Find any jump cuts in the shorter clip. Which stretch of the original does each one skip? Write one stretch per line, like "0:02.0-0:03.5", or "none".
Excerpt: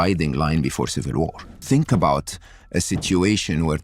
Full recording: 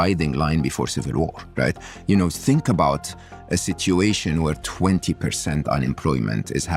0:01.5-0:02.3